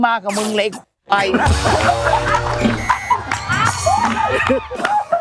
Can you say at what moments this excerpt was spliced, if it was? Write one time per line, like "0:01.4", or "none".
none